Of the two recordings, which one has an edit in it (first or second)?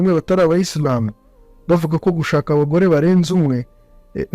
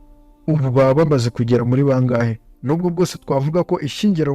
second